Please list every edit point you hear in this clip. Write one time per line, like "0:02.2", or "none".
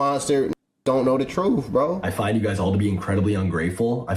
0:01.9